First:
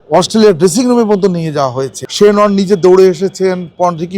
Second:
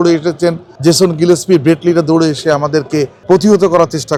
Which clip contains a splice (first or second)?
first